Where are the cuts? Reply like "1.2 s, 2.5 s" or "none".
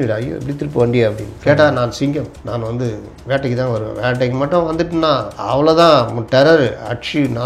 1.3 s, 2.4 s, 5.3 s